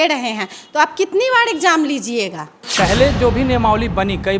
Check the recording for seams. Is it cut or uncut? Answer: cut